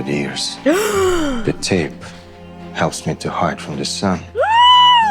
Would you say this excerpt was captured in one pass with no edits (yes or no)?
yes